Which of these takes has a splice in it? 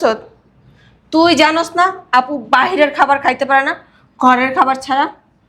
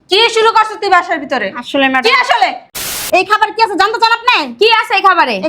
second; 1 cut; at 2.7 s

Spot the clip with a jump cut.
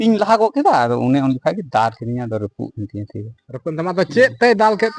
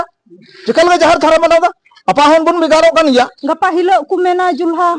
second; 1 cut; at 3.4 s

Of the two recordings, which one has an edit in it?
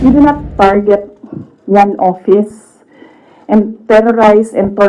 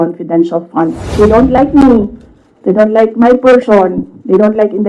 second; 1 cut; at 1.1 s

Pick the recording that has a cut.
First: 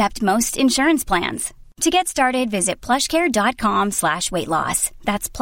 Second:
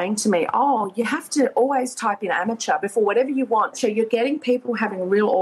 second; 1 cut; at 3.7 s

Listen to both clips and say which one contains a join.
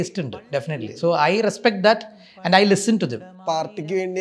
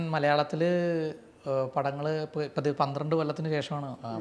first; 1 cut; at 3.3 s

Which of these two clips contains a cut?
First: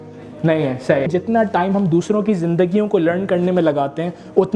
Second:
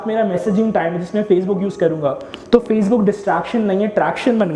first; 1 cut; at 1.1 s

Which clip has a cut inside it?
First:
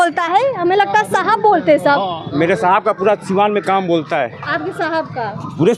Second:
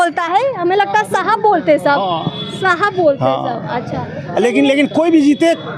first; 1 cut; at 2.2 s

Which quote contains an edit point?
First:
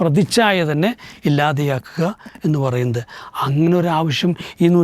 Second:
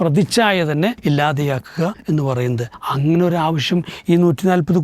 second; 3 cuts; at 1.0 s, 2.0 s, 2.7 s

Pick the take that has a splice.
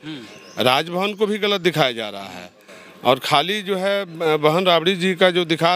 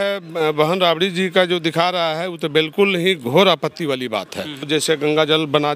second; 1 cut; at 4.7 s

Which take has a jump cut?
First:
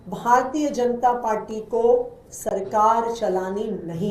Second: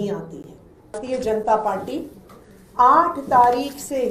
second; 1 cut; at 1.0 s

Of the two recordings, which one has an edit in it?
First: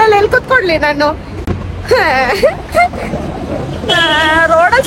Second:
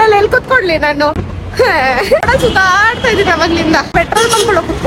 second; 3 cuts; at 1.3 s, 2.2 s, 3.9 s

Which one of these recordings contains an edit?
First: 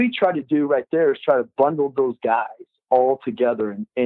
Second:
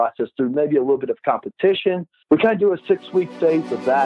second; 1 cut; at 2.1 s

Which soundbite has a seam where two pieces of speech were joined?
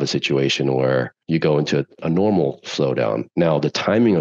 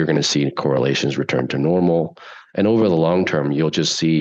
first; 2 cuts; at 1.2 s, 2.0 s

